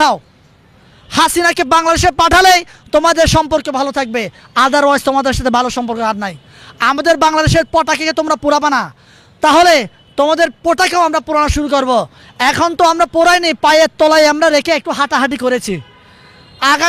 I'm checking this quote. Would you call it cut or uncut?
uncut